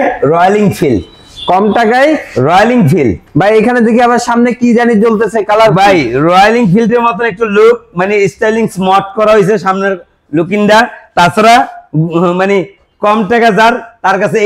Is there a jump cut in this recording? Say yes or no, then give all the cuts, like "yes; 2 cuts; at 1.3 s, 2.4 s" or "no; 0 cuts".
no; 0 cuts